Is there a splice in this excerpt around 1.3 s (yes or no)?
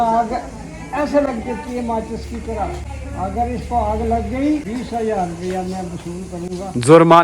no